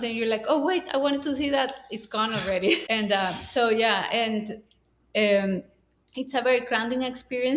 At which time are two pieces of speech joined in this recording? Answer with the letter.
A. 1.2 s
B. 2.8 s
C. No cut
B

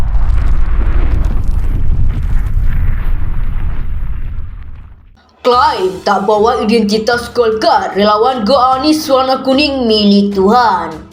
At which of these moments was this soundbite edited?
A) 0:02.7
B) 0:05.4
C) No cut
B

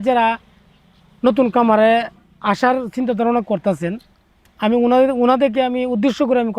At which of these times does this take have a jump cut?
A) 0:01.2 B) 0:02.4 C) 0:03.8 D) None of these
D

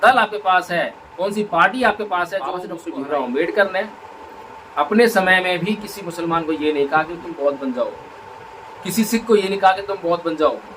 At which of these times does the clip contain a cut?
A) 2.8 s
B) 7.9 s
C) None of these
A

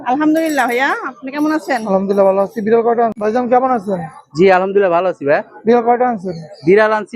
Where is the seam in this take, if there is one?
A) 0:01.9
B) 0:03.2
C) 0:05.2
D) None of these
B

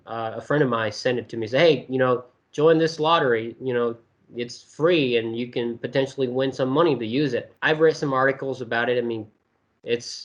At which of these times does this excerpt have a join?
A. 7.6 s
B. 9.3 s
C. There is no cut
C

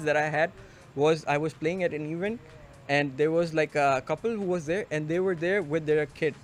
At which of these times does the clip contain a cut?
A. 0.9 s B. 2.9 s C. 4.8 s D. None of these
D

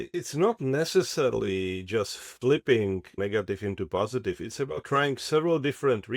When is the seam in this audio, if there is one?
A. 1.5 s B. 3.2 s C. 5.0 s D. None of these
B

